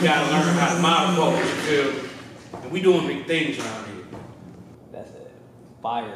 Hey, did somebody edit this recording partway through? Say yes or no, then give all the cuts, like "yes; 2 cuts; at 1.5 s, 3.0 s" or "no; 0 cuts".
yes; 1 cut; at 4.7 s